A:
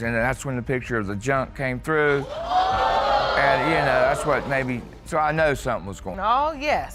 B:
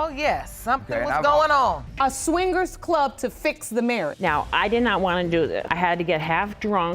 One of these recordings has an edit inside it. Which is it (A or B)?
B